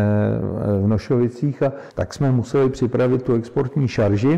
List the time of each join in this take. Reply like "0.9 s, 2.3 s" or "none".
1.9 s